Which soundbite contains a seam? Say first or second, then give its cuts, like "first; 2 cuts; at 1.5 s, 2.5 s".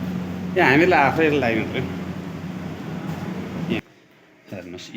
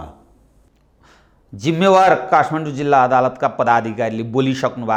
first; 1 cut; at 3.8 s